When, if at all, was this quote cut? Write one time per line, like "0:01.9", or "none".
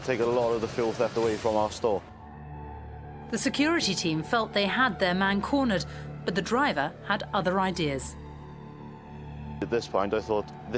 0:09.6